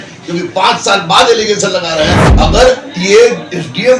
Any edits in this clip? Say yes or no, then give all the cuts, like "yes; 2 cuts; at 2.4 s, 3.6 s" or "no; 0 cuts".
yes; 1 cut; at 2.2 s